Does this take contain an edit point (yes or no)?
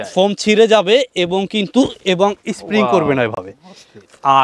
no